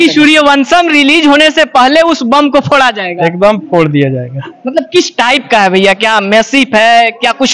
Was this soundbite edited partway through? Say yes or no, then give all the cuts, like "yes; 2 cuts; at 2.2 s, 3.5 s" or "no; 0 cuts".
no; 0 cuts